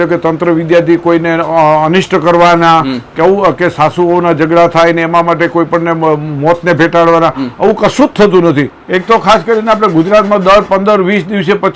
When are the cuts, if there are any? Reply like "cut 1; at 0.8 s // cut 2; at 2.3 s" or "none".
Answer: cut 1; at 8.7 s